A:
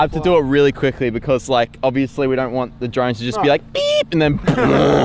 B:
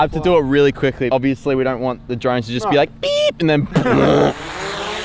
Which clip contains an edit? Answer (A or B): B